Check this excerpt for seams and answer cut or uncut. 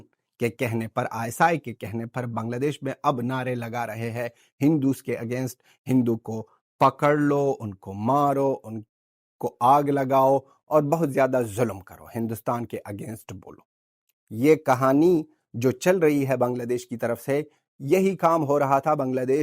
uncut